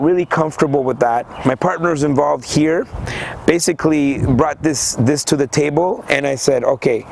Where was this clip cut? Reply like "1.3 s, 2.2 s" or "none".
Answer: 1.3 s